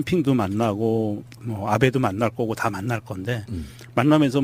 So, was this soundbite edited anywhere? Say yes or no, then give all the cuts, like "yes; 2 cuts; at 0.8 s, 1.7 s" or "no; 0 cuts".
yes; 1 cut; at 3.4 s